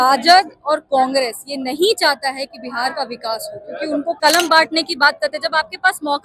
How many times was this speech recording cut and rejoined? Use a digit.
1